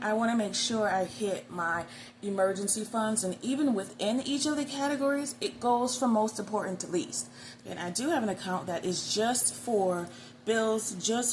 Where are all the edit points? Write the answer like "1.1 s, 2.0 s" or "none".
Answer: 7.5 s